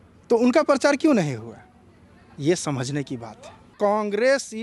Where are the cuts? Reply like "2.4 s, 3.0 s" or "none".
3.7 s